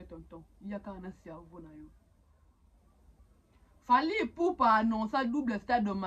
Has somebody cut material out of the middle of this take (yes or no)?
yes